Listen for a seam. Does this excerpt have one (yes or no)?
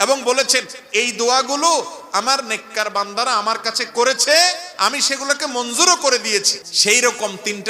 yes